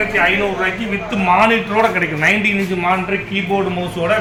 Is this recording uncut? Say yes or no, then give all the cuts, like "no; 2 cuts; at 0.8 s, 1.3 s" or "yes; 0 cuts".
yes; 0 cuts